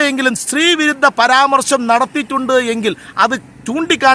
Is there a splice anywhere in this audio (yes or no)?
no